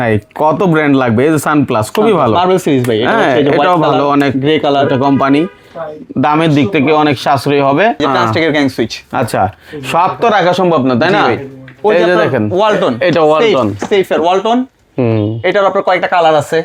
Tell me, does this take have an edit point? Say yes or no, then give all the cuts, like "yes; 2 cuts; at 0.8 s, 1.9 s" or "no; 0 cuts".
no; 0 cuts